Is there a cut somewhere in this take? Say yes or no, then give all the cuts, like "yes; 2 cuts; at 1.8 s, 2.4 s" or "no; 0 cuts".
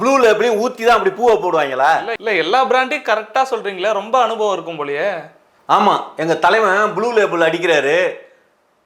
no; 0 cuts